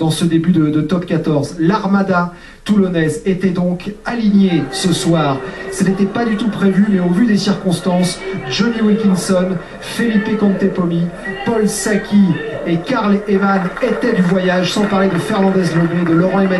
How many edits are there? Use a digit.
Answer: 1